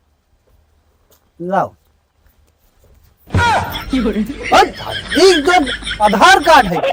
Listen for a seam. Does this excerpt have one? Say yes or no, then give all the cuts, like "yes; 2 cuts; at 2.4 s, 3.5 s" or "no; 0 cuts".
no; 0 cuts